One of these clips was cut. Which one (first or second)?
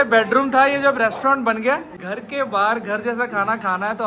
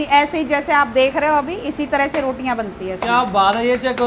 first